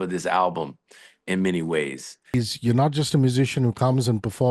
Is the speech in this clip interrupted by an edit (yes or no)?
yes